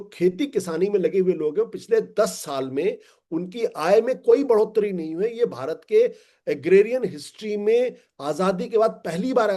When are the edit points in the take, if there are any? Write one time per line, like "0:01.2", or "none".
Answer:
none